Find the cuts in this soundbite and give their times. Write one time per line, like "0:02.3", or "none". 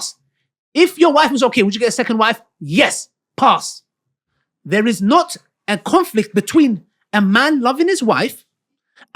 none